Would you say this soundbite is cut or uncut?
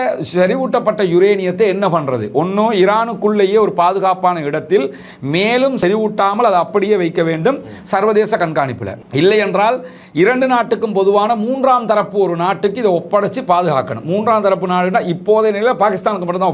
cut